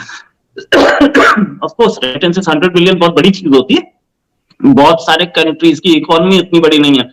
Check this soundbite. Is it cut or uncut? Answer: uncut